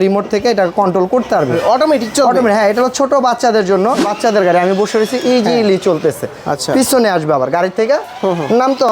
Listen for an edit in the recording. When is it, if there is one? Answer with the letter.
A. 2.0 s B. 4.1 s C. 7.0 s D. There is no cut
B